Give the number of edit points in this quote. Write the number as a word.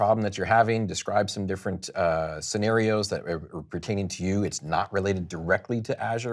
zero